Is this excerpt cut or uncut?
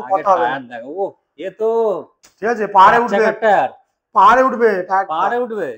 uncut